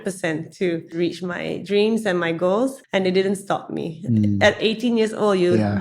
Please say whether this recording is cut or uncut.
cut